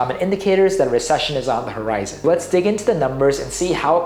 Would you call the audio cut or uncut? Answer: cut